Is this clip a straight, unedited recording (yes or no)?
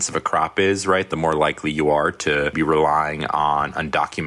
no